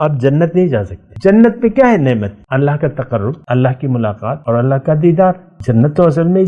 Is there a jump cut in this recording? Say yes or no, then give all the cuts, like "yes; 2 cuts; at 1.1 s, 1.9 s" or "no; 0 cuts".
yes; 5 cuts; at 1.0 s, 2.4 s, 3.4 s, 4.4 s, 5.5 s